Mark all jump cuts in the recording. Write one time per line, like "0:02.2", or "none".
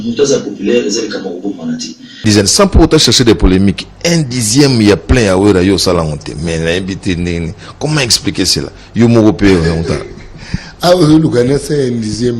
0:02.2